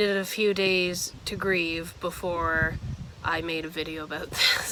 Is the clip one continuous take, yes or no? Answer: yes